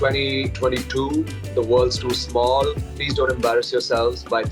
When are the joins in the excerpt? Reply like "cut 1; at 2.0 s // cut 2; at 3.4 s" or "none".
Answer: none